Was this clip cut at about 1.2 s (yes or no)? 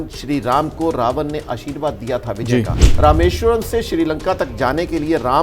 no